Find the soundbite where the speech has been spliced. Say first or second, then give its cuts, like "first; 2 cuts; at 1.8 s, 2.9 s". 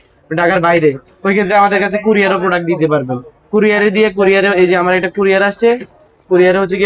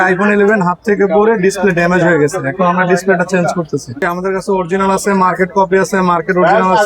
second; 1 cut; at 4.1 s